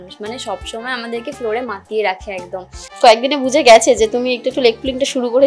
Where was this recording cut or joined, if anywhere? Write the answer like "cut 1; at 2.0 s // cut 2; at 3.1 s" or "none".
cut 1; at 2.9 s